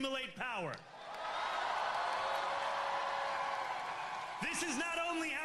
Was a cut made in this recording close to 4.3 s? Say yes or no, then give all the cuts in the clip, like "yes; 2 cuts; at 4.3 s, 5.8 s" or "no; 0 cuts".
no; 1 cut; at 1.9 s